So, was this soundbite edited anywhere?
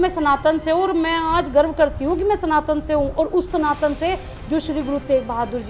no; 0 cuts

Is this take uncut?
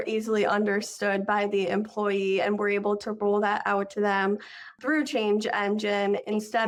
yes; 0 cuts

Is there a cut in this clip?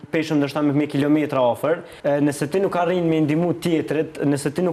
yes; 1 cut; at 1.9 s

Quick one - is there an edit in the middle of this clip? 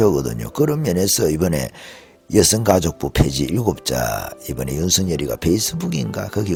no; 0 cuts

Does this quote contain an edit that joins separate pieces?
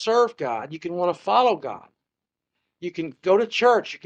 no; 0 cuts

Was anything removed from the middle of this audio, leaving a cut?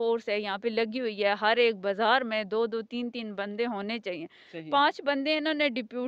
no; 0 cuts

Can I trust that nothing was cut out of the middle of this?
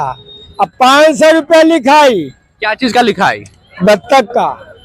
yes; 0 cuts

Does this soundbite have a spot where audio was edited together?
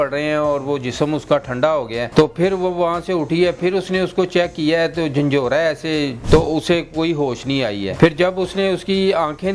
yes; 3 cuts; at 2.0 s, 6.2 s, 7.9 s

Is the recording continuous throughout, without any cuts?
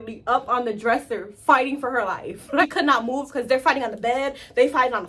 no; 1 cut; at 2.6 s

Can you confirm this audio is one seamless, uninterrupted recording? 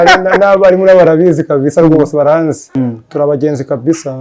no; 1 cut; at 2.6 s

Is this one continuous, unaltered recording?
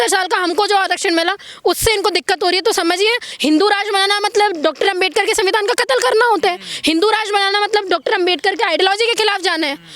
no; 1 cut; at 3.3 s

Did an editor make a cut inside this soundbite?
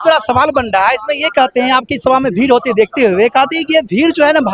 no; 0 cuts

